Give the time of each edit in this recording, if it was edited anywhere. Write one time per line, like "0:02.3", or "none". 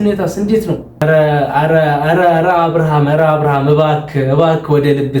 0:01.0